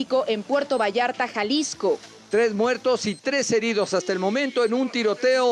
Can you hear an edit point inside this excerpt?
yes; 1 cut; at 2.1 s

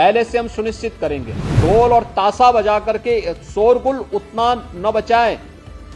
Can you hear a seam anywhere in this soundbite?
yes; 1 cut; at 1.6 s

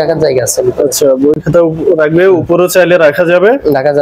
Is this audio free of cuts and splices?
yes; 0 cuts

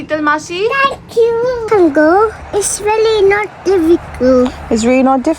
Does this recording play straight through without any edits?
no; 1 cut; at 1.7 s

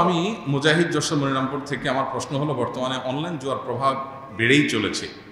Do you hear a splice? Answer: no; 0 cuts

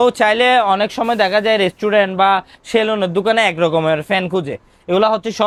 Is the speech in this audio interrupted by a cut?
no; 0 cuts

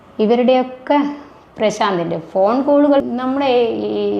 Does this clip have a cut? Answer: yes; 1 cut; at 3.0 s

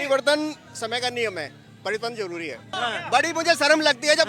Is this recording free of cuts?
no; 1 cut; at 2.7 s

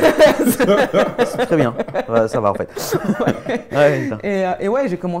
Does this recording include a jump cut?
no; 0 cuts

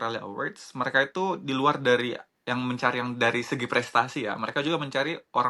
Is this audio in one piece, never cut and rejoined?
yes; 0 cuts

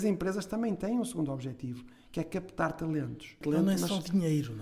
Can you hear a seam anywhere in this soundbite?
yes; 1 cut; at 3.4 s

